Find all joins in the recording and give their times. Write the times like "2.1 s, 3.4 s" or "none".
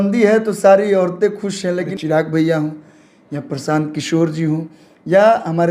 1.9 s